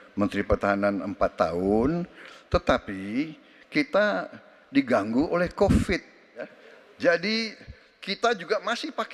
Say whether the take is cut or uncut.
cut